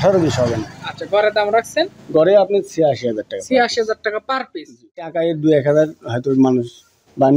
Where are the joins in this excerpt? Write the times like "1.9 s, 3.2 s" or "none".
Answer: 5.1 s

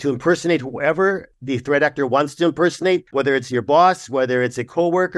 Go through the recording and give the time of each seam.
1.3 s, 3.1 s

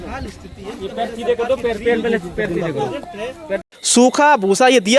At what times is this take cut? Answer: 3.7 s

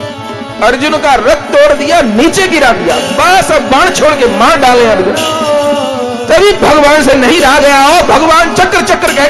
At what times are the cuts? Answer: none

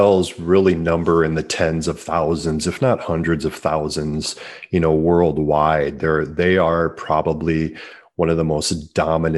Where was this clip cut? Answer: none

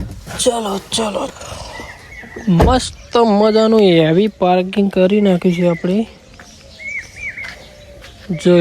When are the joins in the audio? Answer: 1.4 s

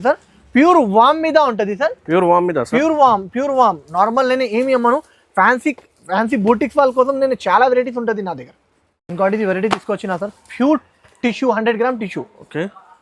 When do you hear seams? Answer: none

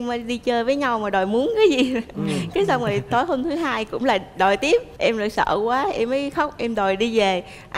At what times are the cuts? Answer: none

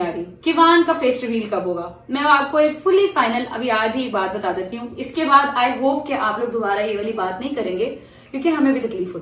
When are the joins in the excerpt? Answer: none

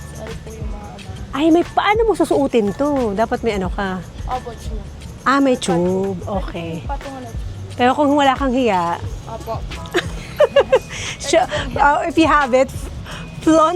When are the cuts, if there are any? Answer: none

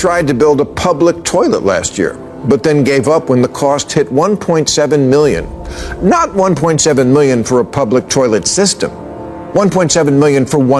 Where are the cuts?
none

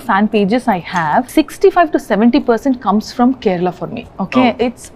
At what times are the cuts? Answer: 1.3 s

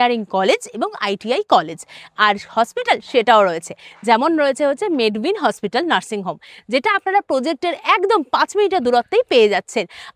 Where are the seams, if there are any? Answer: none

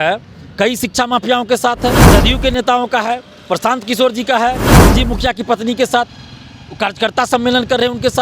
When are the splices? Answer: 2.1 s, 4.7 s

